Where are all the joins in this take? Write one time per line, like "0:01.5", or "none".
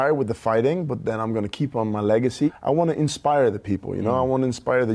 0:02.5